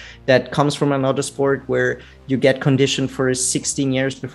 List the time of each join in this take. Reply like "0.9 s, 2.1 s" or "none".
none